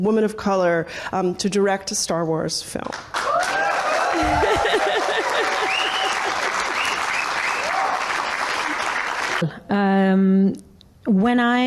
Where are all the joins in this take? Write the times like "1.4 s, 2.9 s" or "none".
9.5 s